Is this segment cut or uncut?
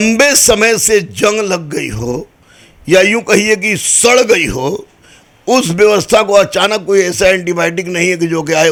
uncut